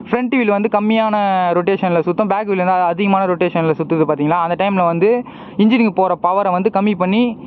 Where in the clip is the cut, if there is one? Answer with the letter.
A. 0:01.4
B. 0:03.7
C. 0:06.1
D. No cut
D